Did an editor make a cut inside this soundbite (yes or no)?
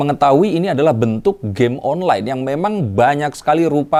no